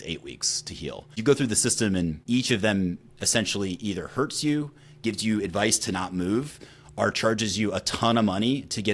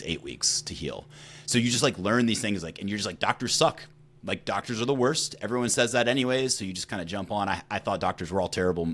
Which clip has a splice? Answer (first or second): first